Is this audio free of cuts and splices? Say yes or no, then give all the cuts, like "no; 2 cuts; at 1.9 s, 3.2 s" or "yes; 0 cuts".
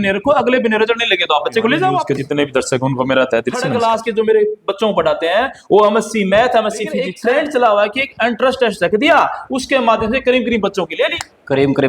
no; 3 cuts; at 2.0 s, 3.7 s, 7.1 s